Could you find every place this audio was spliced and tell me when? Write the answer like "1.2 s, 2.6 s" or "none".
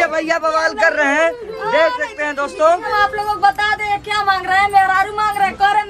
2.9 s